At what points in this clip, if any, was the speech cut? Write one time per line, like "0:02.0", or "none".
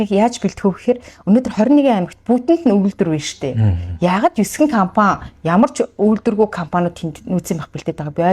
none